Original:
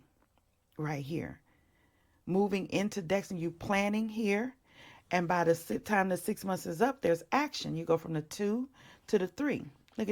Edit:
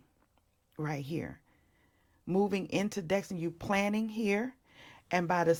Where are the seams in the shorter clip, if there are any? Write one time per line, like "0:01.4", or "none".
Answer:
none